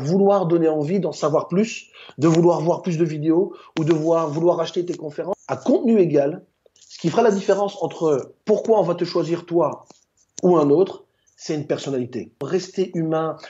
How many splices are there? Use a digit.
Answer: 2